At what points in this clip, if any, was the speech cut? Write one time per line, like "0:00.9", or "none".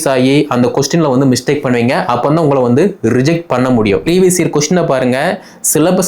0:04.0